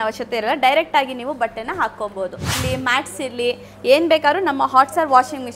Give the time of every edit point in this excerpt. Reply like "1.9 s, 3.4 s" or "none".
2.5 s